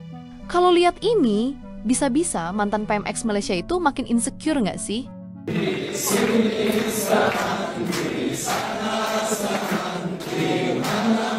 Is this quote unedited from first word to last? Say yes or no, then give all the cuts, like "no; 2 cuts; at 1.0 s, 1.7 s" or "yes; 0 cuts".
yes; 0 cuts